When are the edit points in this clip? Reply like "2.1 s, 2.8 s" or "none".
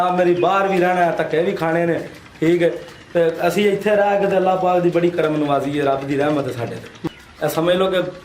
6.9 s